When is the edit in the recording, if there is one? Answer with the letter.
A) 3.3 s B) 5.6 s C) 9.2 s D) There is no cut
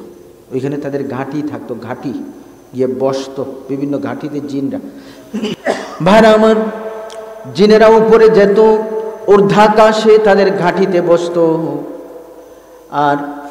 B